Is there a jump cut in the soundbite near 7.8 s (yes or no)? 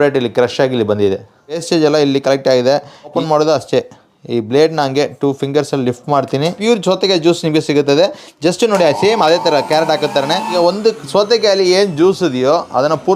no